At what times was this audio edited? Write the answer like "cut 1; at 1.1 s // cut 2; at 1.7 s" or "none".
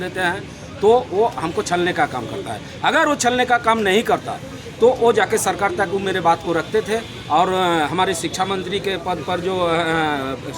none

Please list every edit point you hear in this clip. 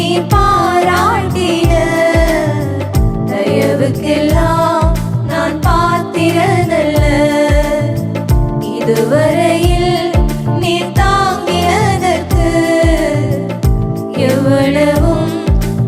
none

